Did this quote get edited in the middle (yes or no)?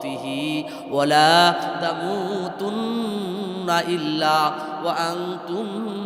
no